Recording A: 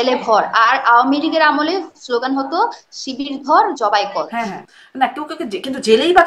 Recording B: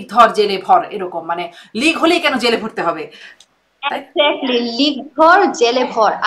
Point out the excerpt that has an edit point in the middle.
A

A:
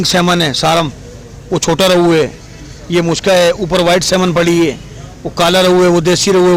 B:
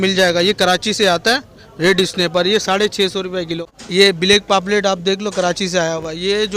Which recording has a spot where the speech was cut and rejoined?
B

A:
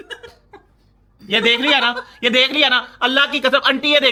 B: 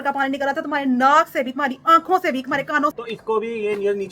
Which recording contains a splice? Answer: B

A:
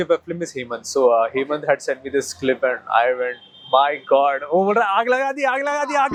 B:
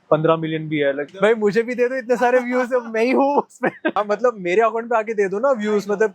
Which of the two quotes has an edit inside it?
B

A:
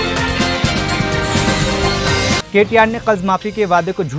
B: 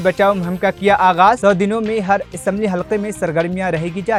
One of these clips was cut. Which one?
A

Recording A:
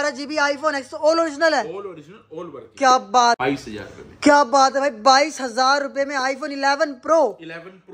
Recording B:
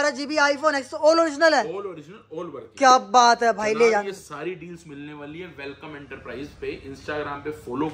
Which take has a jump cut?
A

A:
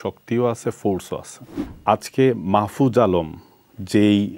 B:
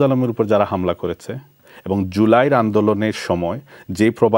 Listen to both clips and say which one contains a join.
A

